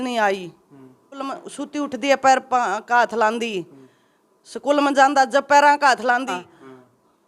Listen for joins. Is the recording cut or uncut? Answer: cut